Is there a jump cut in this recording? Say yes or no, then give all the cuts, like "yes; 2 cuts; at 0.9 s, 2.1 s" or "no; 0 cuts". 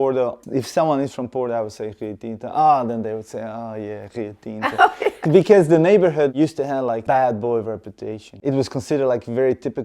yes; 1 cut; at 8.3 s